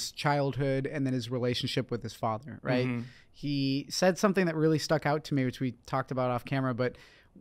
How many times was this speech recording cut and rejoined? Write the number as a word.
zero